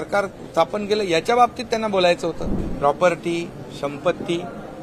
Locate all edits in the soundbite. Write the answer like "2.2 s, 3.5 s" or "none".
2.6 s